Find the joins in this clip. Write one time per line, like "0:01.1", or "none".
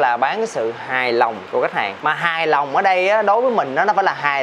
none